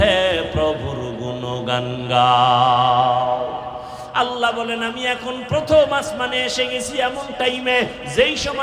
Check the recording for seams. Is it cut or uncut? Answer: uncut